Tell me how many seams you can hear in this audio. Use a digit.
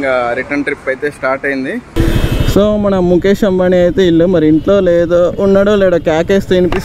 1